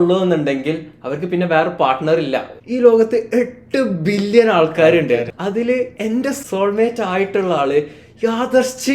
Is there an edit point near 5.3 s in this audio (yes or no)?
yes